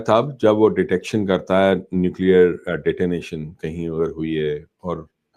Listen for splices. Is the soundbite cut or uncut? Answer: uncut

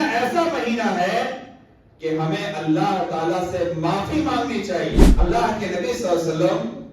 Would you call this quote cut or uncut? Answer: cut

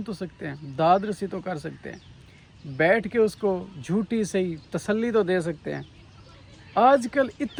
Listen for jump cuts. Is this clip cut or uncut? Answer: uncut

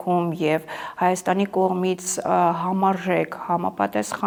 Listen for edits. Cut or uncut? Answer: uncut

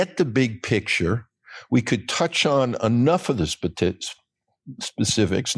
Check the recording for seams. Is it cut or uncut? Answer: uncut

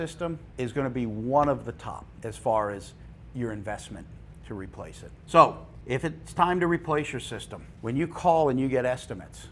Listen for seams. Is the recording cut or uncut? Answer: cut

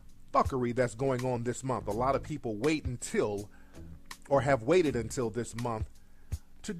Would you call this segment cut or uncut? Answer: cut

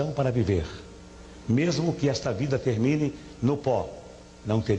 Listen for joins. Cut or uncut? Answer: uncut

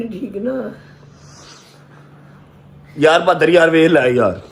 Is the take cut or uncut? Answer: uncut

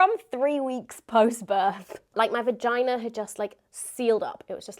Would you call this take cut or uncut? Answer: cut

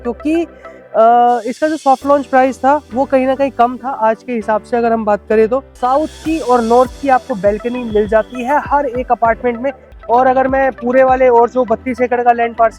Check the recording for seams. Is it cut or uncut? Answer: cut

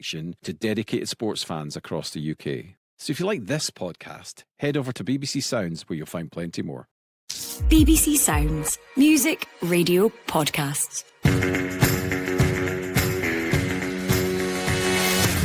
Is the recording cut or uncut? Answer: cut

